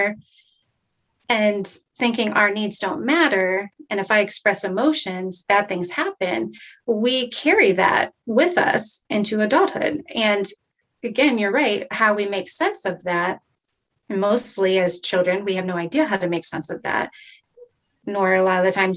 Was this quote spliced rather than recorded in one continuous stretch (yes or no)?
no